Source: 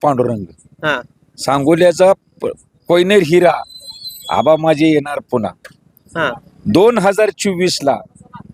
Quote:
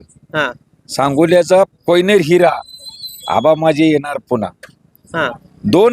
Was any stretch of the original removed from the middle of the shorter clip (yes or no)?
yes